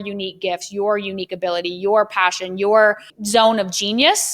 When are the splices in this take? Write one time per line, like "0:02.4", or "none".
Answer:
0:03.1